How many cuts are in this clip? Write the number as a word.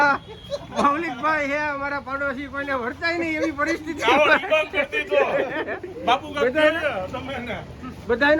zero